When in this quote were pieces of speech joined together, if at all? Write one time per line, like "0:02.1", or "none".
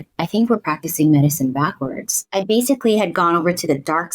0:02.2